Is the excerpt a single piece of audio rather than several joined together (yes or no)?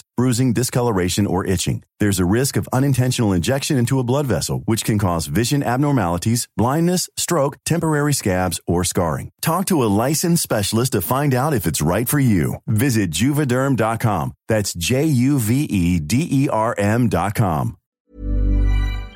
no